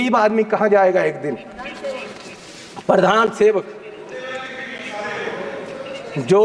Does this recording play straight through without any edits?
yes; 0 cuts

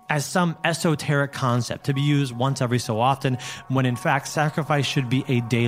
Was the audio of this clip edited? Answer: no; 0 cuts

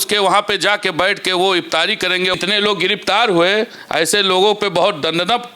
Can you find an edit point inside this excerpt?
yes; 1 cut; at 2.3 s

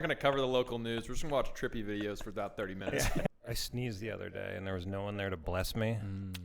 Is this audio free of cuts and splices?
no; 1 cut; at 3.3 s

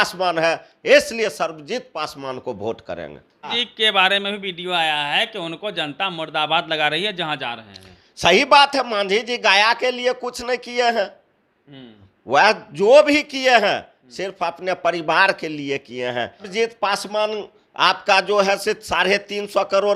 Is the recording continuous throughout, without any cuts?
no; 2 cuts; at 3.5 s, 16.5 s

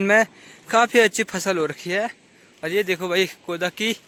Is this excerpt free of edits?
yes; 0 cuts

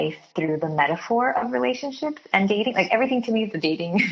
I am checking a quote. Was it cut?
no; 0 cuts

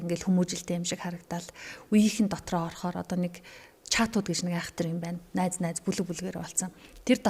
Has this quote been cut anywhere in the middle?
no; 0 cuts

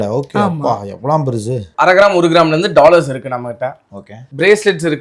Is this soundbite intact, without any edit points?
no; 1 cut; at 1.7 s

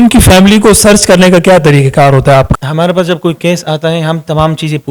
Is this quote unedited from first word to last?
no; 1 cut; at 2.5 s

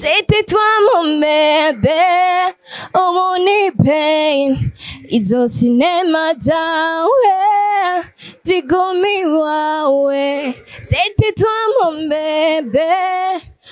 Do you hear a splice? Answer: no; 0 cuts

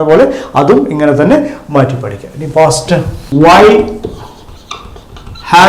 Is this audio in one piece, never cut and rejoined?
no; 1 cut; at 3.2 s

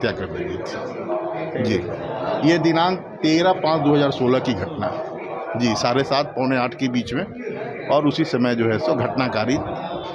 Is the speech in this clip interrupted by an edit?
no; 0 cuts

